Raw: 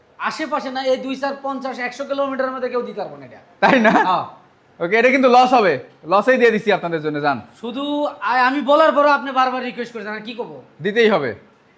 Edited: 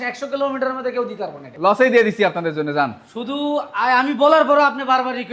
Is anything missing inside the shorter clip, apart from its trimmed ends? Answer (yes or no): yes